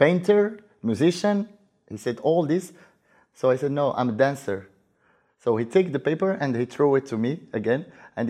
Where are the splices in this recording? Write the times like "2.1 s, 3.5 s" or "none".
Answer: none

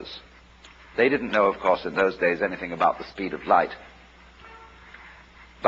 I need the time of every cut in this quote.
none

